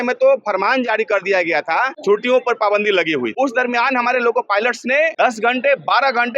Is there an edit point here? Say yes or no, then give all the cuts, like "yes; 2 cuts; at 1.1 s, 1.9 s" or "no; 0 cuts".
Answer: yes; 3 cuts; at 1.9 s, 3.3 s, 5.1 s